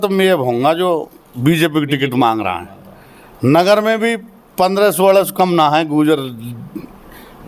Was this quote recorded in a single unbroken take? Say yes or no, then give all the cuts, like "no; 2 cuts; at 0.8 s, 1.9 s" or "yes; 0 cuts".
yes; 0 cuts